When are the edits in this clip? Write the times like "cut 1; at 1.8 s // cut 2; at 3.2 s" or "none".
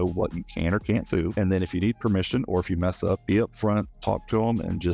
cut 1; at 1.3 s // cut 2; at 3.2 s